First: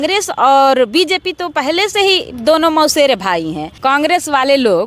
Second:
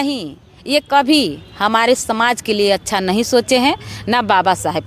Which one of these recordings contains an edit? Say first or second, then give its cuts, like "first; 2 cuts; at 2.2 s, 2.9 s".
first; 1 cut; at 3.6 s